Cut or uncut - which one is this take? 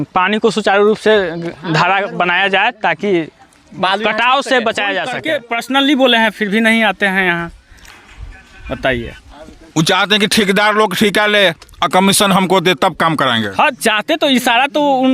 cut